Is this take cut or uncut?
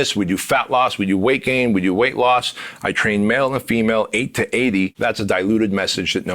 cut